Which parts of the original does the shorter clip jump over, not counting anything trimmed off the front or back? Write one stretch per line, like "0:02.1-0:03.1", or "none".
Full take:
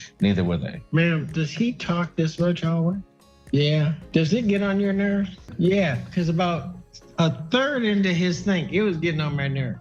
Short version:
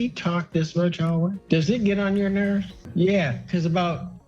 0:03.0-0:04.0